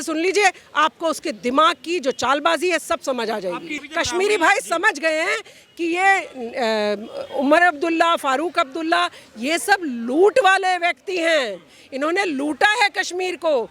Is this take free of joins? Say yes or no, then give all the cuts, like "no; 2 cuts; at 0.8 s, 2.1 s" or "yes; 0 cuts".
no; 1 cut; at 3.7 s